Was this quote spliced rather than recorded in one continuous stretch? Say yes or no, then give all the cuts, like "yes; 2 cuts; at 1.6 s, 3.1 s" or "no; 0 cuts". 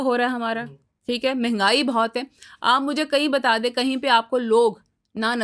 no; 0 cuts